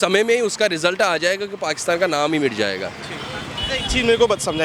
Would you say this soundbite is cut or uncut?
uncut